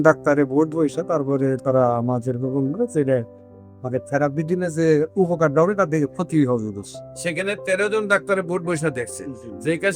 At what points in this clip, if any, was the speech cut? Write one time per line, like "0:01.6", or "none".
none